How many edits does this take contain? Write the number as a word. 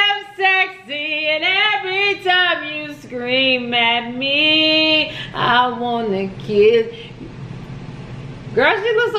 zero